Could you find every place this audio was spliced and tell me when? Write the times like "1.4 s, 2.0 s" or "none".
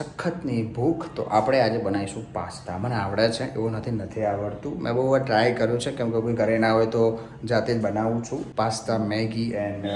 none

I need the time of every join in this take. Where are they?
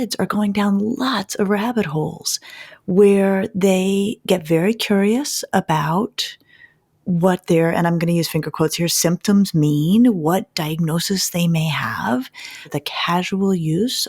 12.7 s

